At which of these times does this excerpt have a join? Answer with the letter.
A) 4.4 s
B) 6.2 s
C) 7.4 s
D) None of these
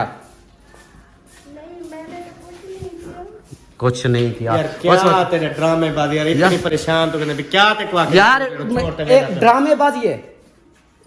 D